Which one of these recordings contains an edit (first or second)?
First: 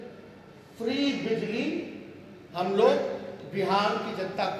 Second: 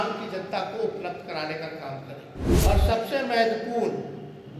second